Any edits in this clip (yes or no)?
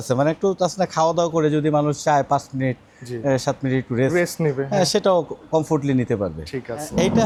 no